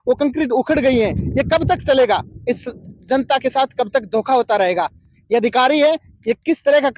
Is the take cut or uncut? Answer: uncut